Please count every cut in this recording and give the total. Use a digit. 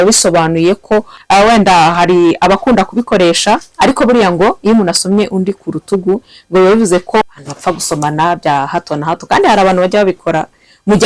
2